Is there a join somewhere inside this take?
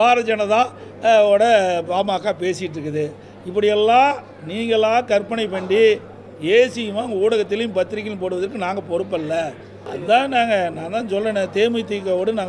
yes; 1 cut; at 9.9 s

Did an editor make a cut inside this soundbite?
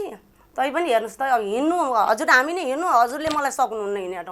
no; 0 cuts

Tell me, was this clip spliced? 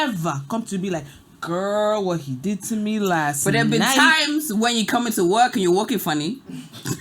no; 0 cuts

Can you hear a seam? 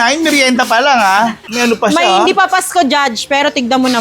yes; 1 cut; at 1.4 s

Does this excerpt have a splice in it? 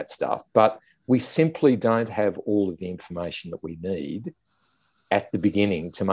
no; 0 cuts

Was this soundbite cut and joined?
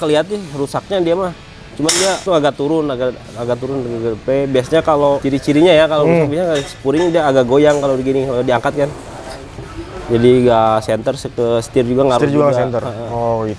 yes; 3 cuts; at 2.2 s, 5.2 s, 9.6 s

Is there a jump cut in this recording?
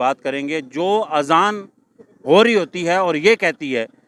no; 0 cuts

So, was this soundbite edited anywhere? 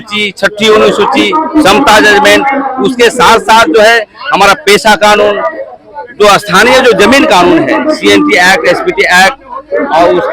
no; 0 cuts

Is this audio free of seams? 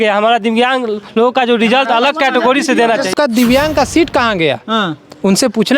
no; 1 cut; at 3.1 s

